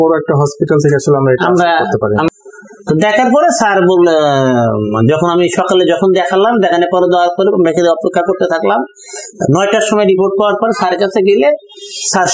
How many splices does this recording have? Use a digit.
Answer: 1